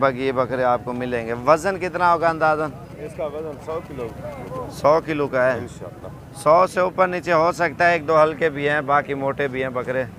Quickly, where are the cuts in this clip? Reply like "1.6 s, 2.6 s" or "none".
none